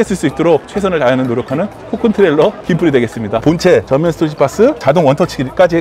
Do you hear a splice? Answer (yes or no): yes